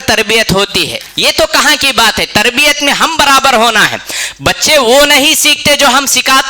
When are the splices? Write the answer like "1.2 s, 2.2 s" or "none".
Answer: 1.0 s